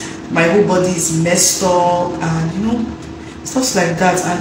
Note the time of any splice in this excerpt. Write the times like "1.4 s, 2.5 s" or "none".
none